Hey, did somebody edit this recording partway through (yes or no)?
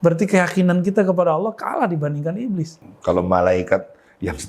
yes